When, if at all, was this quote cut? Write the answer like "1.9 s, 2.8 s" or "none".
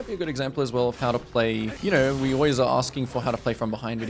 1.7 s